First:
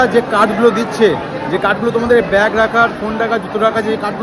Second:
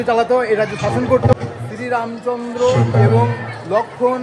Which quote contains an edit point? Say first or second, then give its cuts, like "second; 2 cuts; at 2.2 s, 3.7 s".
second; 1 cut; at 1.3 s